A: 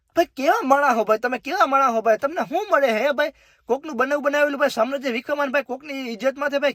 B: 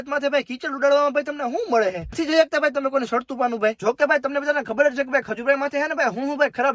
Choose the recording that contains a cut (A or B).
B